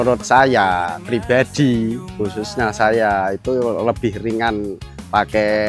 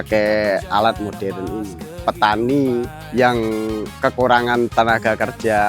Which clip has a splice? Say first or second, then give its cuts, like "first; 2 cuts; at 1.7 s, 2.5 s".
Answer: second; 2 cuts; at 2.0 s, 3.0 s